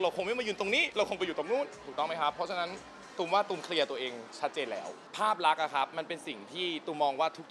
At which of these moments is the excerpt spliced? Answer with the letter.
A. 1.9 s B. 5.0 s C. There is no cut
B